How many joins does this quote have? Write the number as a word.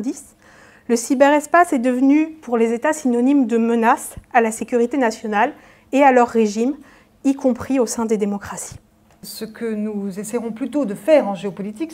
one